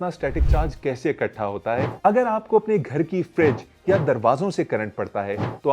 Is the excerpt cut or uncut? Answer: cut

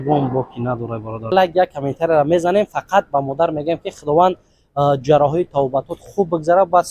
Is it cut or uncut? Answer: cut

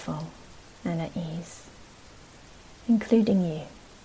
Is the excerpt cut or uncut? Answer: uncut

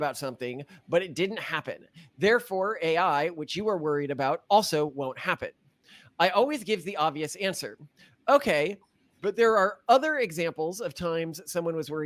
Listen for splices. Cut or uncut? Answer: uncut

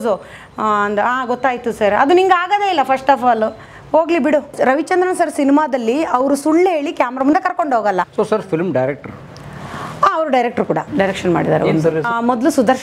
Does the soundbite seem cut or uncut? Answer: cut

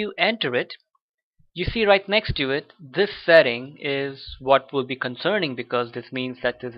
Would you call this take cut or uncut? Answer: uncut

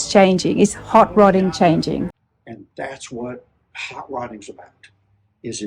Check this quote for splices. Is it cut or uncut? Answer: cut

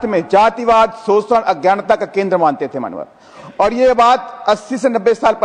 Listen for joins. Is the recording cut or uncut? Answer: uncut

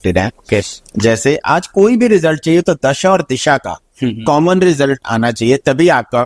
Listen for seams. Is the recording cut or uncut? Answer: uncut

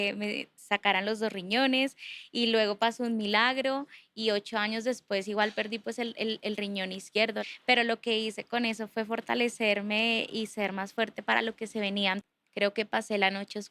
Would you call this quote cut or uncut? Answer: cut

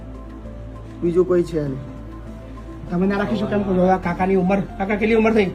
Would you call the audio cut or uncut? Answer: uncut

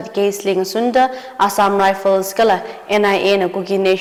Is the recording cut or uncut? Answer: uncut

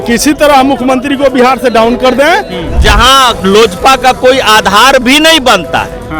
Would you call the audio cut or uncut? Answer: cut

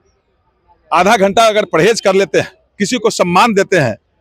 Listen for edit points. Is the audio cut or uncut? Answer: uncut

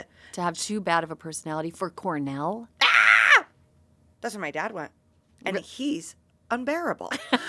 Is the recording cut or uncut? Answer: uncut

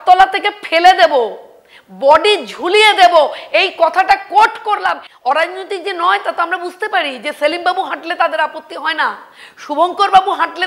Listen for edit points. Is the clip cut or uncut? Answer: cut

